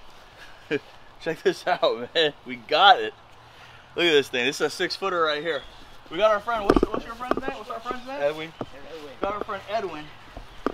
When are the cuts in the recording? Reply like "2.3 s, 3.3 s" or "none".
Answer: none